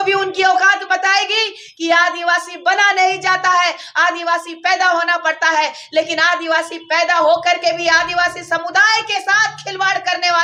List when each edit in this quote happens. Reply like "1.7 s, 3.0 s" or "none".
none